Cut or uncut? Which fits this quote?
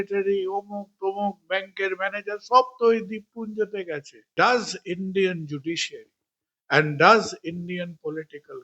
cut